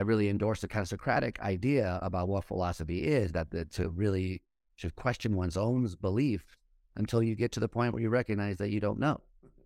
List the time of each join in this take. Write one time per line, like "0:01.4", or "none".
none